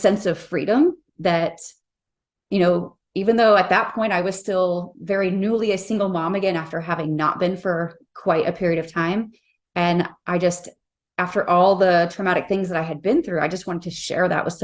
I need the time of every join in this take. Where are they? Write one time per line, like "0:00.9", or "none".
none